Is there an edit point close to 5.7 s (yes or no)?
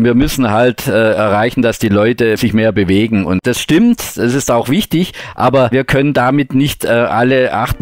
yes